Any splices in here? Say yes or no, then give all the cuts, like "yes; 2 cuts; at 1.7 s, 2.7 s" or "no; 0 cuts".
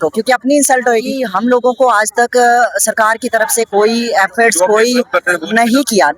yes; 1 cut; at 1.2 s